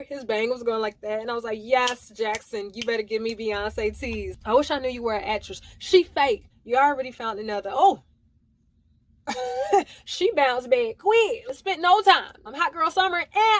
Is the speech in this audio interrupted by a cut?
yes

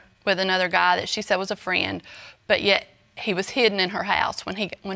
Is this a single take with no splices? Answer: yes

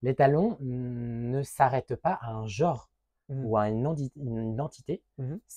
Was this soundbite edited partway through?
no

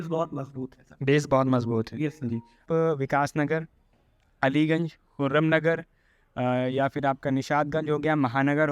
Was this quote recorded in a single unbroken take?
no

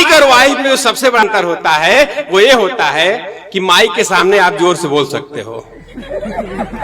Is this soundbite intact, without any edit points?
no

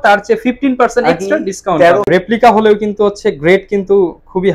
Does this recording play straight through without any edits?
no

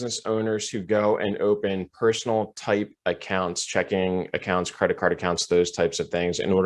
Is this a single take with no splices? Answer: yes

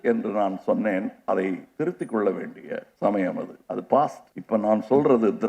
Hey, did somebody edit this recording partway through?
yes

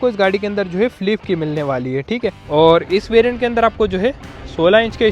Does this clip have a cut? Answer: yes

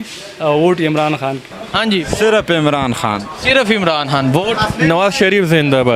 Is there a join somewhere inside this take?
yes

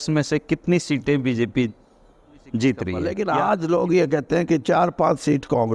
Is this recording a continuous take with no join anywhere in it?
no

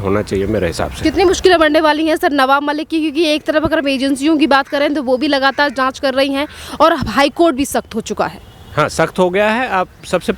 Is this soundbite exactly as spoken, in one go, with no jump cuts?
yes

